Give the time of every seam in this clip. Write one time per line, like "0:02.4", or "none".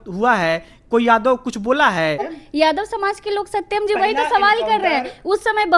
0:02.4